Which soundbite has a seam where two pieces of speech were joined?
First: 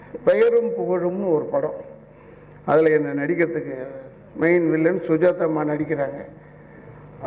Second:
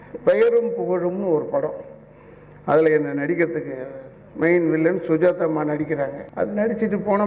second; 1 cut; at 6.2 s

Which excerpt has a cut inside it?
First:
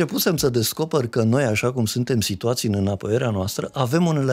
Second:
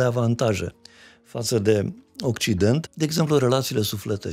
second; 1 cut; at 2.9 s

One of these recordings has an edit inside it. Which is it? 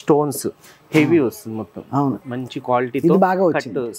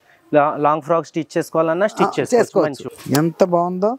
second; 1 cut; at 2.9 s

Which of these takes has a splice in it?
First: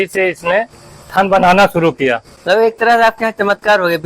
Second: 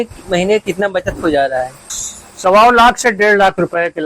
first; 1 cut; at 2.3 s

